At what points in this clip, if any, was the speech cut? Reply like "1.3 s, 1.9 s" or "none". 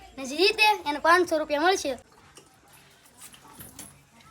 2.0 s